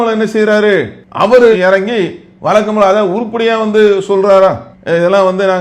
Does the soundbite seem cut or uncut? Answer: uncut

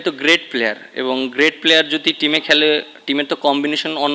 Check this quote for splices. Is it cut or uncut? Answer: uncut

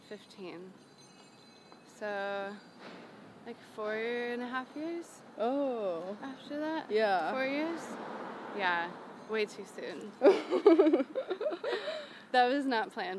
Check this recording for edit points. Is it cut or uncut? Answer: uncut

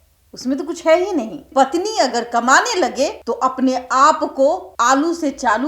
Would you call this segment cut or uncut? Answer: cut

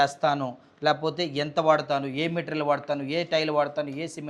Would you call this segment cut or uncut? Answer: uncut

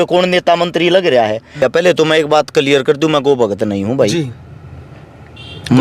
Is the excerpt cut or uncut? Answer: cut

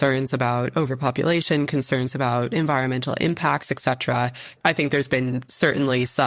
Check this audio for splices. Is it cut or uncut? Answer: cut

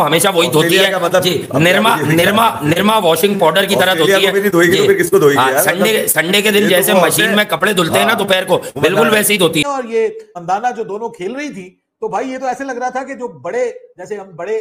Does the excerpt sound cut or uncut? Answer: cut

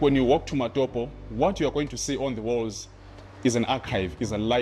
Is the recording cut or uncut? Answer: uncut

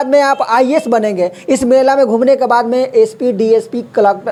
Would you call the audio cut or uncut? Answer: uncut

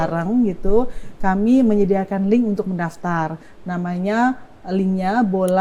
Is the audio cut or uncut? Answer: uncut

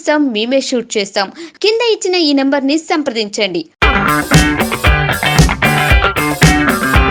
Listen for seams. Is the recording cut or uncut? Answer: uncut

